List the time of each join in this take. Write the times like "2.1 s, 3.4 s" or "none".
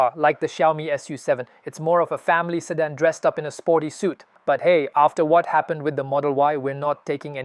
4.3 s